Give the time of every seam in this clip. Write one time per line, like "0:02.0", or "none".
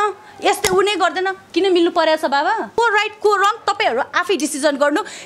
0:02.8